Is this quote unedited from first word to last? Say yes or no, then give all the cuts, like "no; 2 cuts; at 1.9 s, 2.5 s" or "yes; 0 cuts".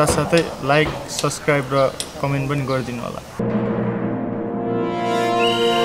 no; 1 cut; at 3.4 s